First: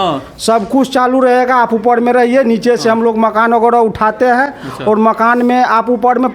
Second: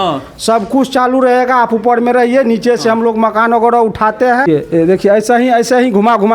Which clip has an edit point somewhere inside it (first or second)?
second